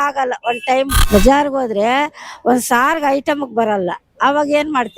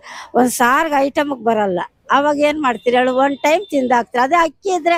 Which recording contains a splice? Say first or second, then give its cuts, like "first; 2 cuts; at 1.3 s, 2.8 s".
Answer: first; 1 cut; at 1.0 s